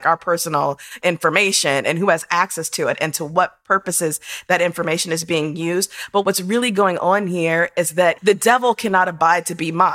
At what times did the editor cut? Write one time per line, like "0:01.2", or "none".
0:01.0
0:06.2
0:08.2